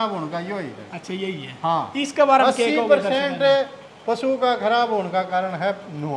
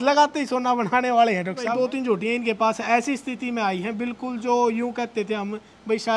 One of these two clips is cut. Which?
second; 1 cut; at 1.7 s

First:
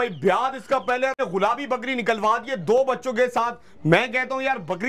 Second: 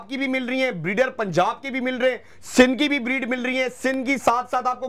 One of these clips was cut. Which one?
first; 1 cut; at 1.2 s

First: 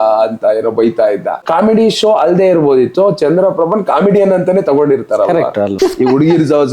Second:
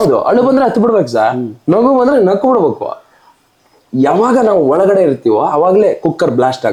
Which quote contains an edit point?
first; 2 cuts; at 1.4 s, 5.8 s

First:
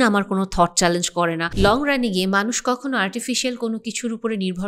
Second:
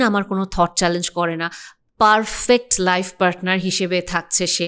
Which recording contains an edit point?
first; 1 cut; at 1.5 s

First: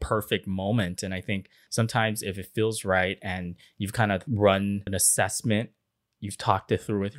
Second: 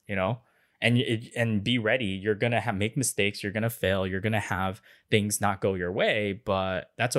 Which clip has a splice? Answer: first; 3 cuts; at 1.5 s, 4.2 s, 4.9 s

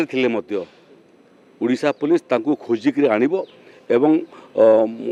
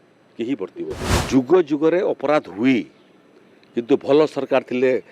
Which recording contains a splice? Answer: second; 1 cut; at 1.0 s

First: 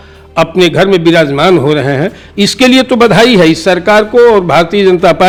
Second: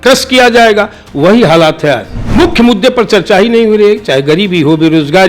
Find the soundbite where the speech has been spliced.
second; 1 cut; at 2.1 s

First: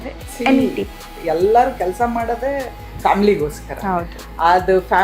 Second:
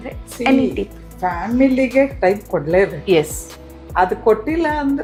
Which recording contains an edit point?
first; 1 cut; at 1.1 s

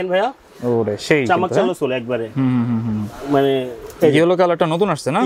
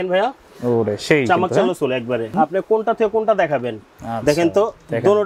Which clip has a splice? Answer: second; 1 cut; at 2.3 s

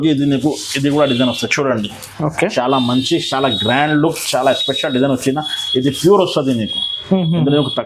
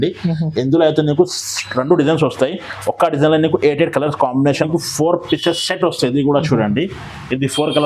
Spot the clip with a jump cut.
second; 1 cut; at 4.7 s

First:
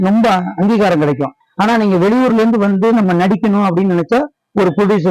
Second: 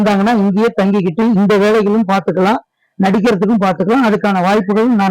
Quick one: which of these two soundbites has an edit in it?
first; 1 cut; at 1.4 s

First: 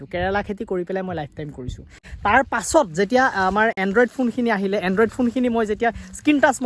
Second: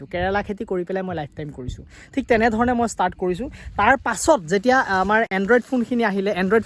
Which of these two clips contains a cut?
first; 1 cut; at 2.0 s

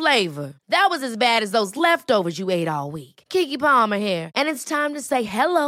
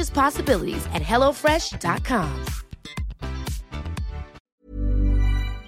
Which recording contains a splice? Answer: second; 1 cut; at 4.4 s

